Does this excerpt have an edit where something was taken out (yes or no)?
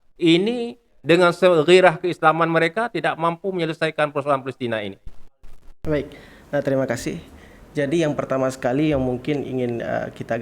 no